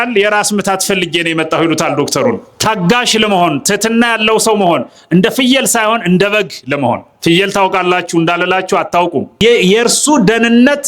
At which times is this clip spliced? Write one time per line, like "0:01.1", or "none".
0:02.5
0:09.4